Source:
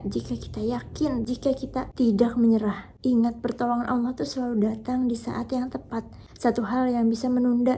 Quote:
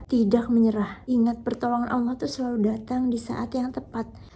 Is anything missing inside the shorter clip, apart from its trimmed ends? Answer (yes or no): yes